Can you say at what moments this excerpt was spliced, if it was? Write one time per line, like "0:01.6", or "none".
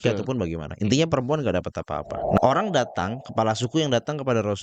0:02.4

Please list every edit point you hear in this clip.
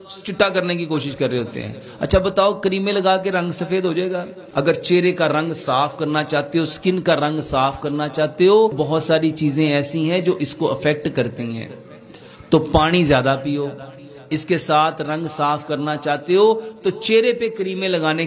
0:04.4
0:08.7

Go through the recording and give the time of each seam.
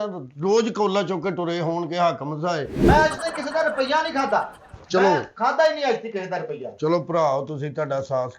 0:02.8

